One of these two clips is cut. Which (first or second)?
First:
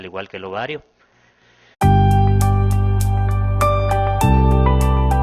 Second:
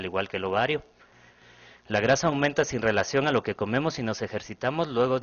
second